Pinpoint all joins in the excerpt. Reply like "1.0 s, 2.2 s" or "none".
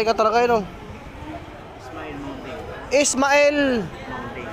1.8 s